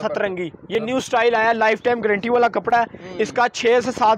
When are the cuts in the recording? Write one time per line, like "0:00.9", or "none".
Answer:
none